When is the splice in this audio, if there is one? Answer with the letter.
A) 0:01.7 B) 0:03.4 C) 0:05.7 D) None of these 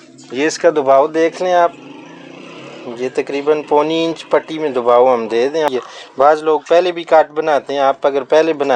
C